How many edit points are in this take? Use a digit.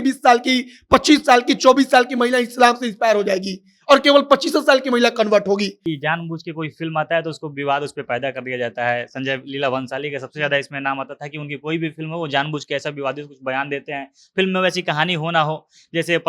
1